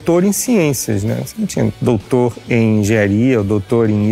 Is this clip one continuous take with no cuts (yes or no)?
yes